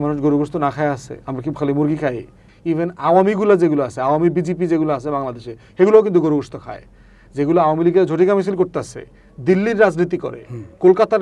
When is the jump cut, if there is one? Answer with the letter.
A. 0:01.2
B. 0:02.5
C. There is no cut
B